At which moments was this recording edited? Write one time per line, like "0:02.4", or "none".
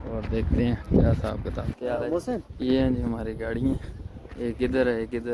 0:01.7
0:02.5